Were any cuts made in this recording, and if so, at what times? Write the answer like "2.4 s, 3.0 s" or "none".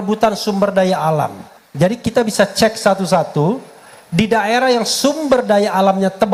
none